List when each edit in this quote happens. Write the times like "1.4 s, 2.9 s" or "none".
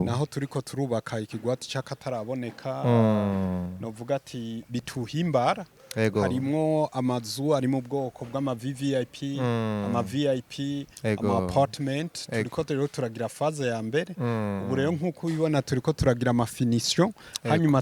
none